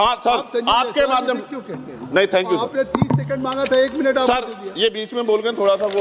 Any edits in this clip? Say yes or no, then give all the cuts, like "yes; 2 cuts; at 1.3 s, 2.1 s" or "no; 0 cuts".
no; 0 cuts